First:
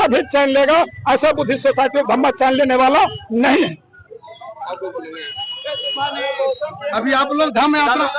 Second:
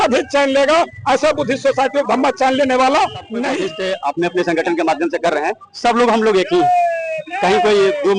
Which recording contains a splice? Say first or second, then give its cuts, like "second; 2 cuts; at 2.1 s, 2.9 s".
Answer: second; 1 cut; at 3.7 s